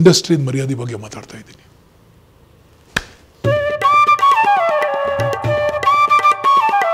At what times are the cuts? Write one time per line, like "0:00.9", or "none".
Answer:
0:03.2